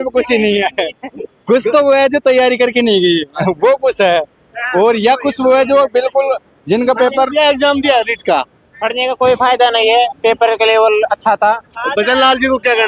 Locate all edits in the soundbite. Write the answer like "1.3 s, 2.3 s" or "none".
none